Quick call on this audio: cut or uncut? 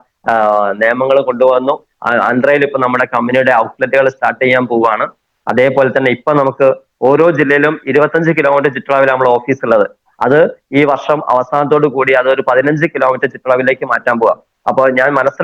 uncut